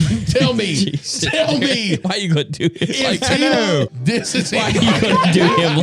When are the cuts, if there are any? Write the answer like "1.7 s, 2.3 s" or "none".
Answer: 3.9 s